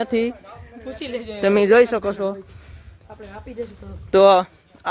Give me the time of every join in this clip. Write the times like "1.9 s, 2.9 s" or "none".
none